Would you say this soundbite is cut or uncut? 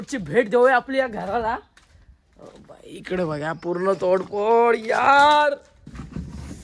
uncut